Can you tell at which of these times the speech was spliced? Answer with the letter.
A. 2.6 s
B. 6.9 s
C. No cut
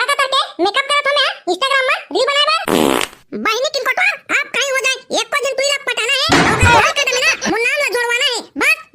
A